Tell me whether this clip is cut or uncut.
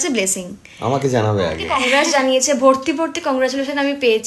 cut